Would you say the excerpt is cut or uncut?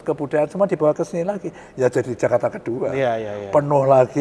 uncut